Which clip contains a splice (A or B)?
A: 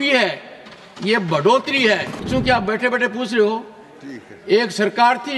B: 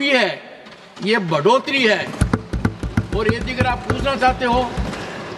A